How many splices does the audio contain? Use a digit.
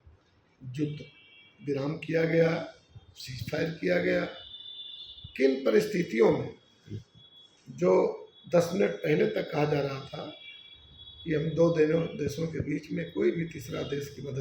0